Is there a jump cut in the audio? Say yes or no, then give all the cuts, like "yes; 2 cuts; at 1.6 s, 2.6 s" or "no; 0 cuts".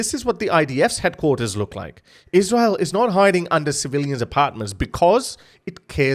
no; 0 cuts